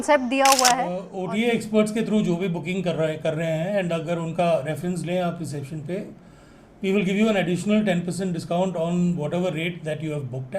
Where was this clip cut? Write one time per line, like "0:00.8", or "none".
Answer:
0:01.1